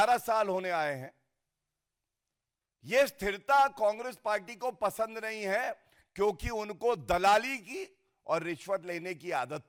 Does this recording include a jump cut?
no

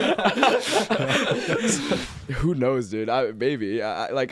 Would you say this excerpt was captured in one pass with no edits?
no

